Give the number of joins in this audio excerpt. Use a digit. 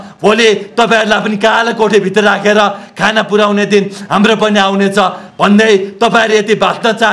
0